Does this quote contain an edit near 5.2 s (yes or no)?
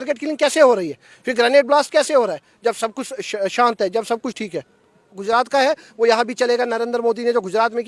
yes